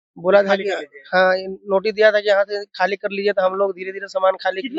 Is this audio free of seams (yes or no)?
yes